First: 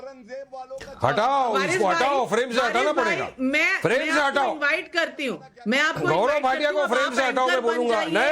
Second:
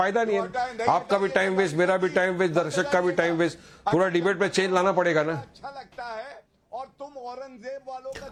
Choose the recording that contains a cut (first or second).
first